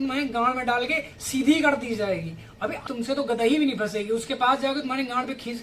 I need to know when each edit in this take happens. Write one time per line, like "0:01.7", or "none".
0:02.8